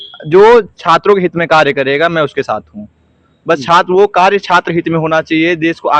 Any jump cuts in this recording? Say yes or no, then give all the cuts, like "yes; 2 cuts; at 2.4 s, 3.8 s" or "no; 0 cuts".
no; 0 cuts